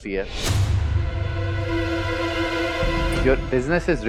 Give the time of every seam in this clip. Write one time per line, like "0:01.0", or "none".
none